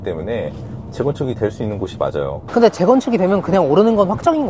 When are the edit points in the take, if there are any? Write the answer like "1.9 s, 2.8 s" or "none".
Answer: 2.5 s